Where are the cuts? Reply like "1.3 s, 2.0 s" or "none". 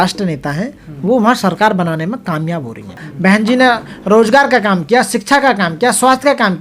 3.1 s